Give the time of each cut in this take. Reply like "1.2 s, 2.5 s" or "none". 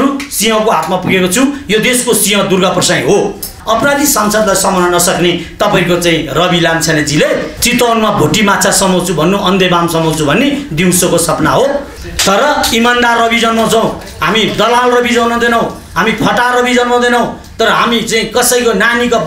3.6 s, 7.5 s, 11.9 s